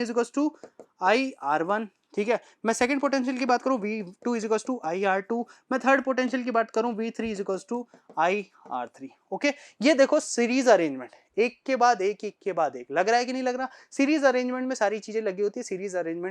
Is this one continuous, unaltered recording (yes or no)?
yes